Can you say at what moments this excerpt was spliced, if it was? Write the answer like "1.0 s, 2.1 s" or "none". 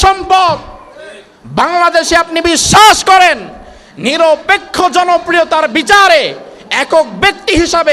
none